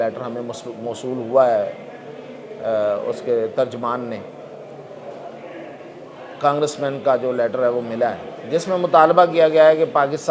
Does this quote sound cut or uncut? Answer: uncut